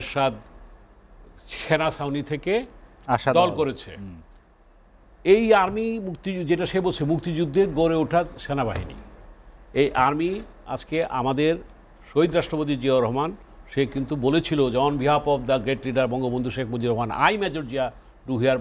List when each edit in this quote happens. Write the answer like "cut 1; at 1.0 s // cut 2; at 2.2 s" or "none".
none